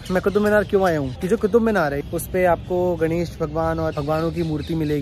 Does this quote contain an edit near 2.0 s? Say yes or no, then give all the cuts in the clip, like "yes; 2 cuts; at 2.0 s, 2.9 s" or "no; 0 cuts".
yes; 3 cuts; at 1.2 s, 2.0 s, 3.9 s